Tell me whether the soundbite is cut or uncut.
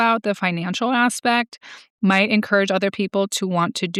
uncut